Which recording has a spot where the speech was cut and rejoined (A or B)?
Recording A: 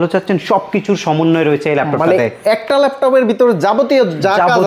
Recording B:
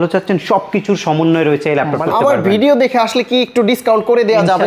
B